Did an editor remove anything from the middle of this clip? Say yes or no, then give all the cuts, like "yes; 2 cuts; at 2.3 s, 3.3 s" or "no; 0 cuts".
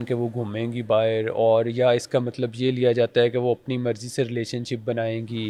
no; 0 cuts